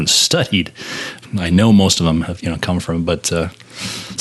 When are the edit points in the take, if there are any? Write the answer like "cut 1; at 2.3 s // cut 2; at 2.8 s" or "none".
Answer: cut 1; at 1.2 s

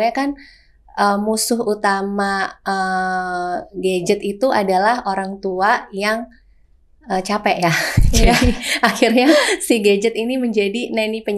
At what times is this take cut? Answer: none

